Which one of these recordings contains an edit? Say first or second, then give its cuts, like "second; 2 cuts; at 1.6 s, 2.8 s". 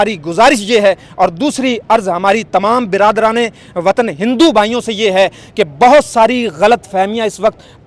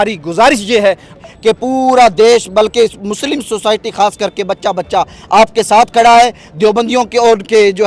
second; 1 cut; at 1.1 s